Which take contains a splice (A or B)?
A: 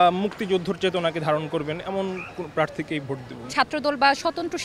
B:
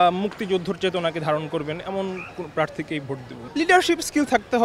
A